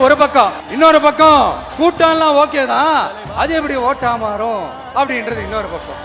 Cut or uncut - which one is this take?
uncut